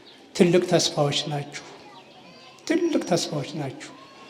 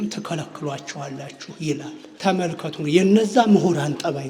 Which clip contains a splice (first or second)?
second